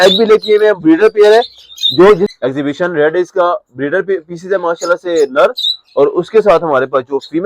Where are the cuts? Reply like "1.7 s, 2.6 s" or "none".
2.3 s